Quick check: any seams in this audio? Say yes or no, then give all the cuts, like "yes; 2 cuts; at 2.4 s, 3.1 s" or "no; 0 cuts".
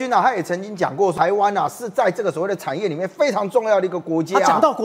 yes; 1 cut; at 1.1 s